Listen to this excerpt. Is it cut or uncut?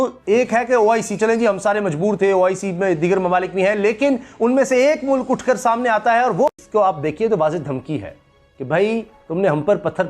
cut